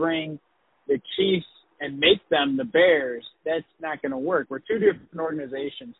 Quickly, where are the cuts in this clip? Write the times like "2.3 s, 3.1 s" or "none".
4.5 s